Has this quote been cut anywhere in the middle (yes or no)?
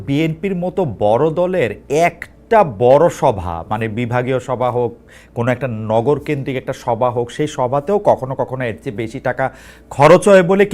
no